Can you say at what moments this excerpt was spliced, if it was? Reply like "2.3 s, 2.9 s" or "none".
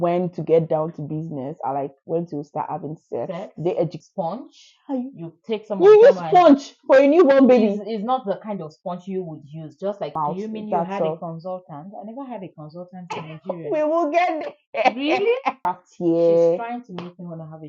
4.0 s, 10.1 s, 15.6 s